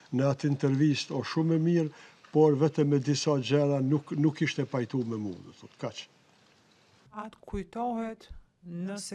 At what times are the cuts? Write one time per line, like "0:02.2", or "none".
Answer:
0:07.0